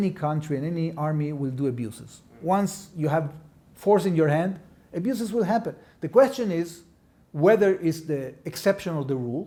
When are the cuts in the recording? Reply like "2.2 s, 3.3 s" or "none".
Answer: none